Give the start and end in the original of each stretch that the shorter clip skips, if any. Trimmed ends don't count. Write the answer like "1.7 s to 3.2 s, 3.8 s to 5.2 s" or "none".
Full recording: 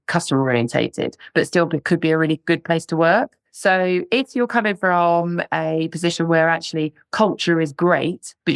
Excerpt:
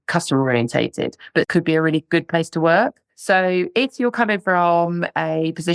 1.5 s to 1.8 s